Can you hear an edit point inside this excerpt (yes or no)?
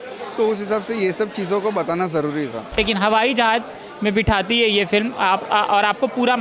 yes